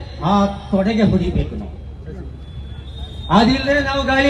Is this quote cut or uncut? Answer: uncut